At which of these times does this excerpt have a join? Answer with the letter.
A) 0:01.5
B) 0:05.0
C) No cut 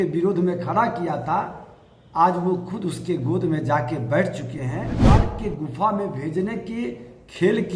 B